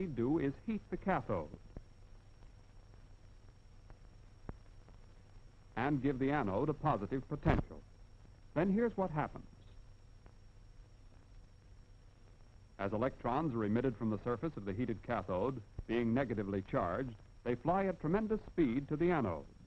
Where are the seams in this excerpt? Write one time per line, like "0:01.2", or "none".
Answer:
0:15.7